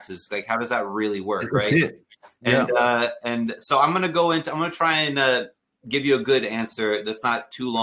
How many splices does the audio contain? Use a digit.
0